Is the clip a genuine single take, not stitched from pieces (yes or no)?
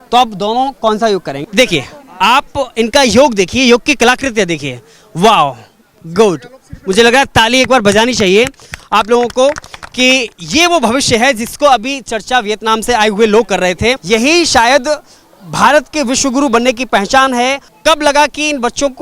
no